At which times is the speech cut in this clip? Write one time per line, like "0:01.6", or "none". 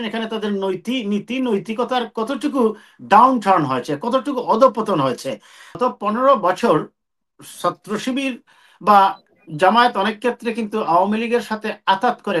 0:05.8